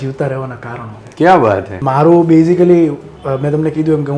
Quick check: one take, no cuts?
no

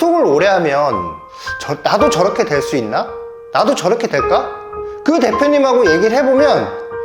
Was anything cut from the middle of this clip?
no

